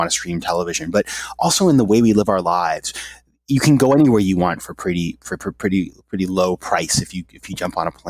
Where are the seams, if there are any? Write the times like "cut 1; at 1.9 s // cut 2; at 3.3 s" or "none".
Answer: none